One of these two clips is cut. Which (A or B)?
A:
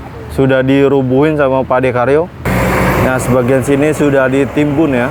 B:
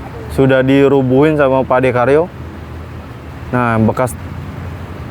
A